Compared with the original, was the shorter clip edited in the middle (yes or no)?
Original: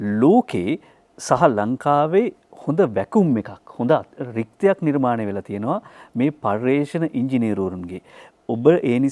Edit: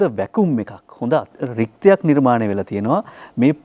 no